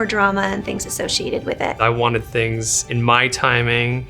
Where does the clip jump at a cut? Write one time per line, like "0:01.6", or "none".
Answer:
0:01.8